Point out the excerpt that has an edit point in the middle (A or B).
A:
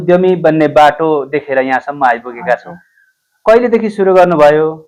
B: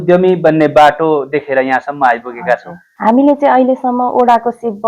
B